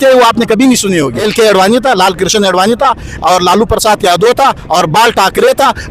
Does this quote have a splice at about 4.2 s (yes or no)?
no